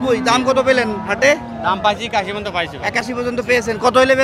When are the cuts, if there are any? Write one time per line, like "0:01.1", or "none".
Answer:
none